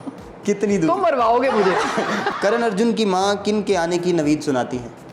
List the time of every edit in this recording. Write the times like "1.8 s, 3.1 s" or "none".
2.2 s

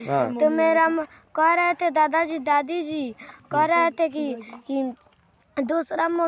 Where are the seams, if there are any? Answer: none

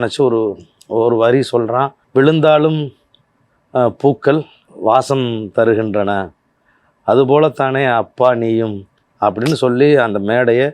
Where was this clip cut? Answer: 2.0 s

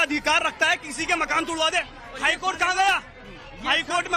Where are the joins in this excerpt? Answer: 2.0 s

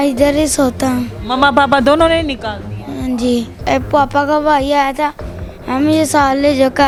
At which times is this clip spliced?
none

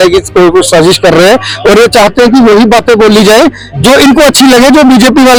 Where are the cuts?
none

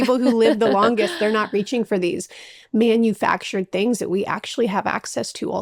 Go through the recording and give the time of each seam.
none

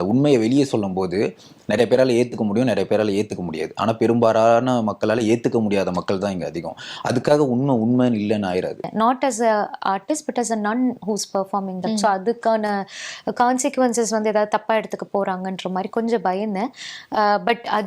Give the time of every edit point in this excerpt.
8.8 s

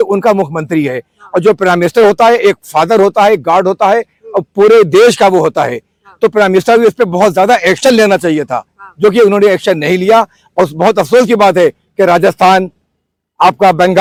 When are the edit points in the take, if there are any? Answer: none

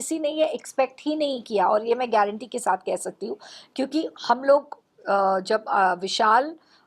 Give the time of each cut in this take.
none

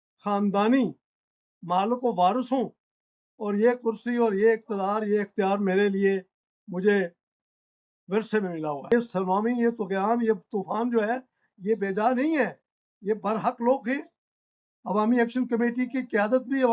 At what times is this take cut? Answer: 8.9 s

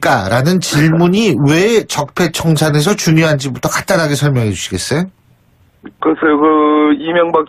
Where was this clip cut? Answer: 2.8 s

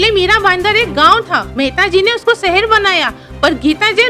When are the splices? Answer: 1.5 s

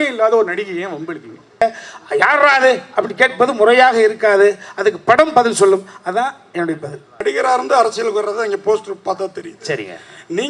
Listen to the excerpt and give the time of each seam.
1.6 s, 7.2 s

